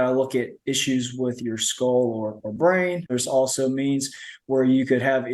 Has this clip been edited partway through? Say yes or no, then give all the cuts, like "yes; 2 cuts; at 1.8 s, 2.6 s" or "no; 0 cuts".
yes; 1 cut; at 3.2 s